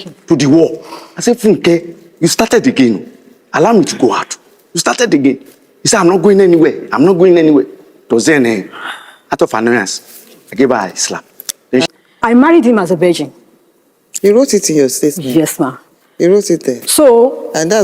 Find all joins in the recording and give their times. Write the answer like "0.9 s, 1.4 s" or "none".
11.9 s